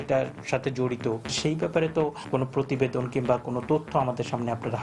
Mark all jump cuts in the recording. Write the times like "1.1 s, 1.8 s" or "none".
1.3 s